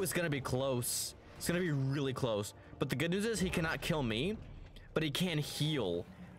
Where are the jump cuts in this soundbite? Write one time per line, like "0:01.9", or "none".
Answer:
none